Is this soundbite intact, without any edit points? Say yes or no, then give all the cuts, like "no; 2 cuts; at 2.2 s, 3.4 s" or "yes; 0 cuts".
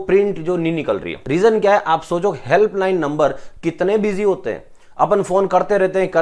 no; 1 cut; at 1.2 s